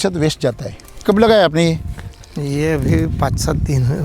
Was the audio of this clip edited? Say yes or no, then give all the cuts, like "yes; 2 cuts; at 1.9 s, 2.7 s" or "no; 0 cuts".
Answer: yes; 1 cut; at 1.0 s